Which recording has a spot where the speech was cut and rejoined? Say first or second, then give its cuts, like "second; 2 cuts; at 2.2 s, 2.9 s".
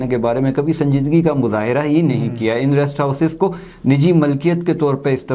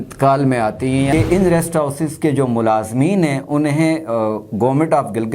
second; 1 cut; at 1.1 s